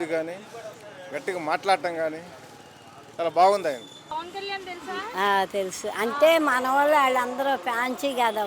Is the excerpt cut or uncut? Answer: cut